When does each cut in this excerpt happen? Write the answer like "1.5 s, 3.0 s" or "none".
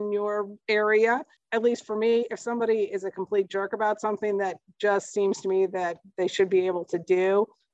1.4 s